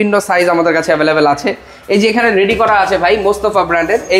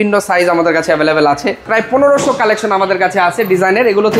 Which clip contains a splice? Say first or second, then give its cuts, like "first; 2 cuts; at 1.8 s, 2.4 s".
second; 1 cut; at 1.6 s